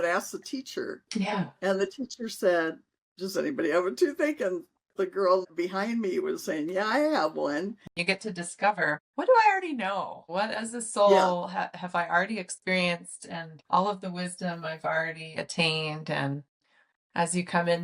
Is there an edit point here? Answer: yes; 1 cut; at 7.9 s

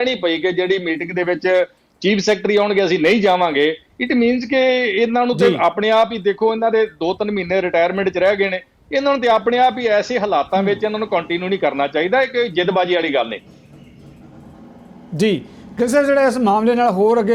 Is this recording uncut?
yes; 0 cuts

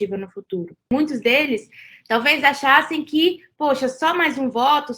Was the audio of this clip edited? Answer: yes; 1 cut; at 0.9 s

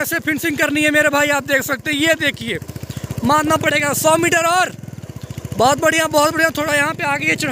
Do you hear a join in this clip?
no; 0 cuts

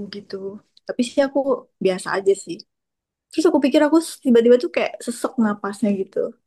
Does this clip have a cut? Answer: no; 0 cuts

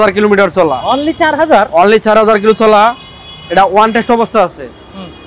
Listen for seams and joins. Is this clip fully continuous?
yes; 0 cuts

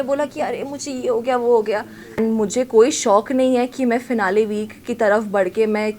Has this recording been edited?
yes; 1 cut; at 2.2 s

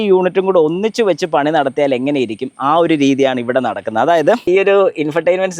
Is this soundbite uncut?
no; 1 cut; at 4.5 s

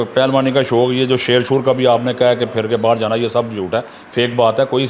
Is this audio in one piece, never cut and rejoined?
yes; 0 cuts

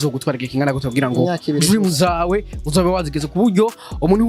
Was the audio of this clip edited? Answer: no; 0 cuts

